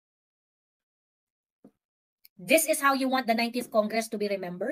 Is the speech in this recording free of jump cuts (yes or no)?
yes